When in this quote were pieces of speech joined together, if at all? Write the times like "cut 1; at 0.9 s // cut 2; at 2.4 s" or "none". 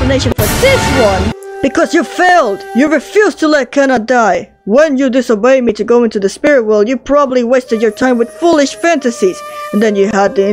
cut 1; at 1.4 s

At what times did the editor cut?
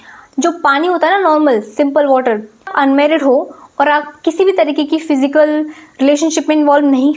cut 1; at 2.6 s

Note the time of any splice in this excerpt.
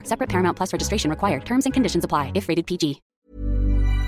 cut 1; at 3.1 s

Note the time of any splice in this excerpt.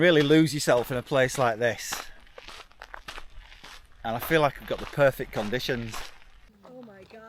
cut 1; at 6.3 s

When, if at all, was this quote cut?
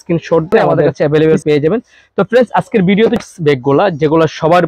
cut 1; at 1.0 s // cut 2; at 3.2 s

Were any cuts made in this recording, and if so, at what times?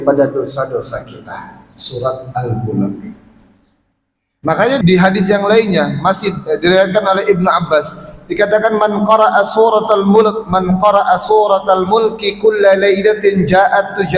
cut 1; at 4.8 s

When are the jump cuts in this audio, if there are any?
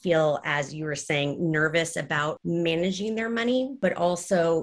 cut 1; at 2.4 s // cut 2; at 3.7 s

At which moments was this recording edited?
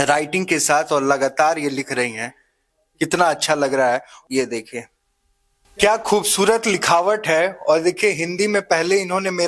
none

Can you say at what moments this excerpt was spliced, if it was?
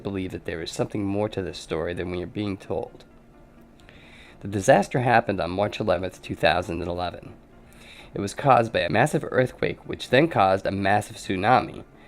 cut 1; at 8.2 s

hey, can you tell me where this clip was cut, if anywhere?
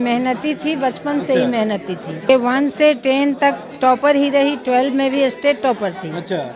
cut 1; at 2.3 s

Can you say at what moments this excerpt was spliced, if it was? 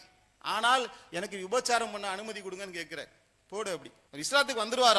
cut 1; at 4.0 s

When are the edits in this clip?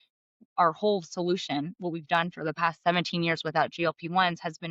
cut 1; at 2.8 s

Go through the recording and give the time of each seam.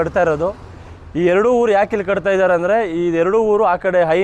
none

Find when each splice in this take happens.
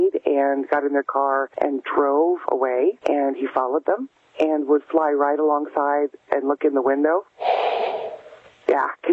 cut 1; at 1.5 s // cut 2; at 3.0 s

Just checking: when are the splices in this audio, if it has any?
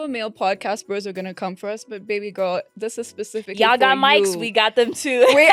none

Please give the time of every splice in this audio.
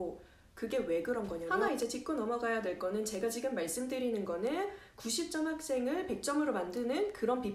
cut 1; at 1.5 s

